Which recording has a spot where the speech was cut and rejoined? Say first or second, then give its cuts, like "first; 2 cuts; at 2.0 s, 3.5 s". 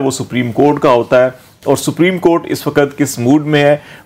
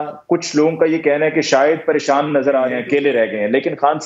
second; 1 cut; at 2.8 s